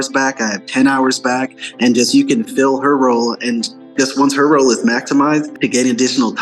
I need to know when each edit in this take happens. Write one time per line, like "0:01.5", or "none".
0:05.5